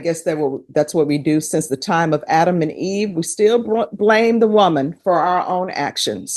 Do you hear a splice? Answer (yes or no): no